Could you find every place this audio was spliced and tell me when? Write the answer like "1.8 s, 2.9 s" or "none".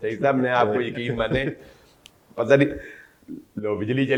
none